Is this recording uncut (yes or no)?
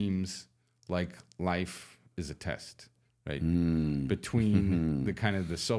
yes